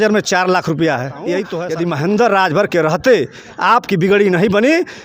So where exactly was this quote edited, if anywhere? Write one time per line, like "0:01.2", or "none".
0:01.6